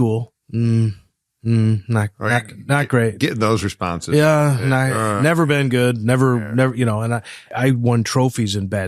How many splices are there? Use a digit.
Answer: 0